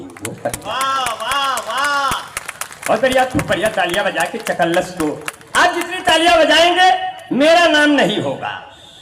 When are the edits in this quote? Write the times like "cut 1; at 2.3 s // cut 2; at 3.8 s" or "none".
none